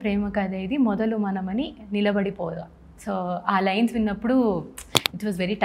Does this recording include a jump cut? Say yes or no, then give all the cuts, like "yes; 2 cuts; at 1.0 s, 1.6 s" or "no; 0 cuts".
no; 0 cuts